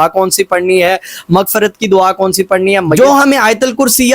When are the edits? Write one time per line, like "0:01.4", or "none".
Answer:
0:03.0